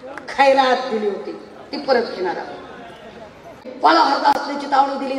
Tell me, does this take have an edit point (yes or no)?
yes